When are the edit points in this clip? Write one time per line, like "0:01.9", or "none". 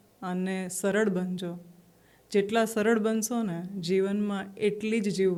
none